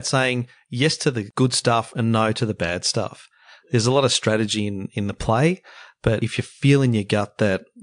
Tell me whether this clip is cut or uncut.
cut